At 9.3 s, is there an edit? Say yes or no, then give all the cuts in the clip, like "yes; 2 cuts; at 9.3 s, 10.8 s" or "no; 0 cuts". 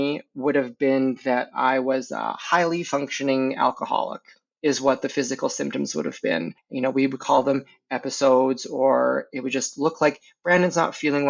no; 1 cut; at 6.6 s